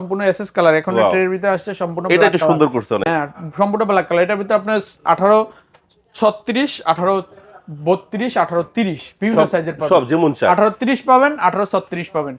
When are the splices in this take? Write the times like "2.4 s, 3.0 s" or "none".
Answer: none

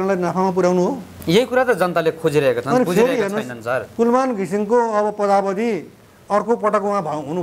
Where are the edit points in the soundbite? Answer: 1.1 s

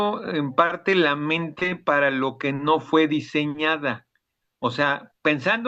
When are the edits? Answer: none

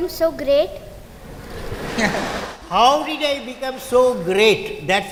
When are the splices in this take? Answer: none

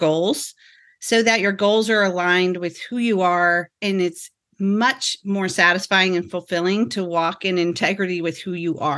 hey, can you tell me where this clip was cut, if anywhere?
none

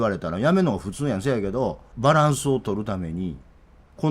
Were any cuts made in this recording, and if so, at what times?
1.8 s

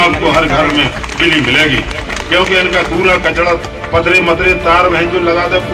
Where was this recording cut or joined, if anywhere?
none

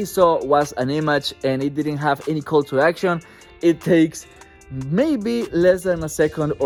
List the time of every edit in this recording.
none

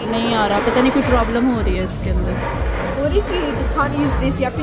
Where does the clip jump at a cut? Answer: none

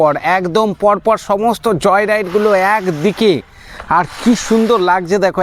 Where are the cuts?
none

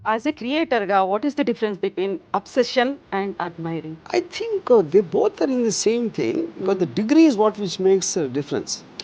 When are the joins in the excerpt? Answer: 4.0 s

